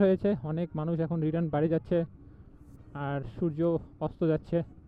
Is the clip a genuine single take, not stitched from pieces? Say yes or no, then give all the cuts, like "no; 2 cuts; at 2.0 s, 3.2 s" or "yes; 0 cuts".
yes; 0 cuts